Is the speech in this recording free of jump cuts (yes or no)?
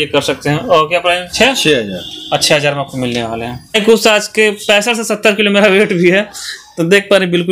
no